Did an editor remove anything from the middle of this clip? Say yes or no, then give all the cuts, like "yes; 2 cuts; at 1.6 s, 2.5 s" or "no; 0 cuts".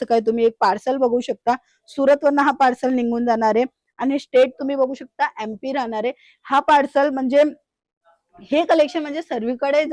no; 0 cuts